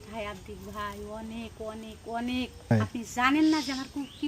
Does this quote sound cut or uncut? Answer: cut